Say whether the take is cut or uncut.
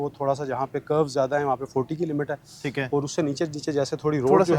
uncut